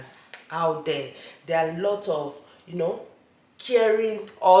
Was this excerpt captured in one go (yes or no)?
yes